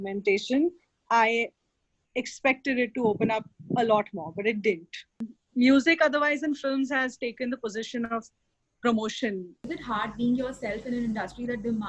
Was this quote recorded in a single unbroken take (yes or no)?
yes